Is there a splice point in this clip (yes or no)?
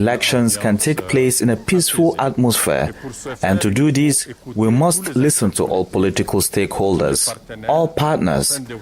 no